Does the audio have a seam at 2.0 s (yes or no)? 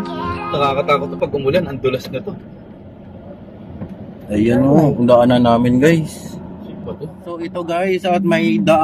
no